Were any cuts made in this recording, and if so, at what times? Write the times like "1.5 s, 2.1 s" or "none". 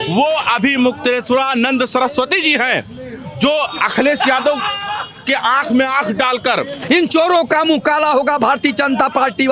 6.8 s

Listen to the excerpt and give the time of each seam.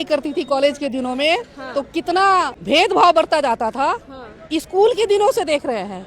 2.6 s

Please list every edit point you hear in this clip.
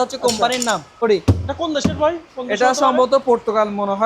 1.0 s

